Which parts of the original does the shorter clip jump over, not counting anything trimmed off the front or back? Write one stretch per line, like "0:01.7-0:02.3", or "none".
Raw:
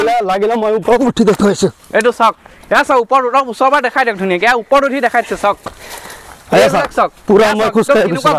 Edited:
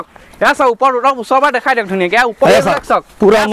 0:04.7-0:06.5